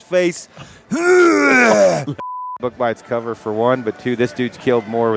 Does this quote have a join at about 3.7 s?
no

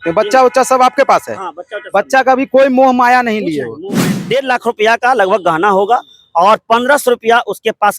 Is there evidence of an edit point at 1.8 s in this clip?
no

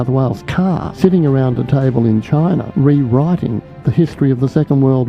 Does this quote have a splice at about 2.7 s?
yes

